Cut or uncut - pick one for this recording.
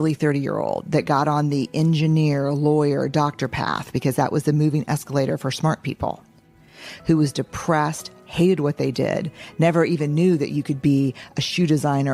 uncut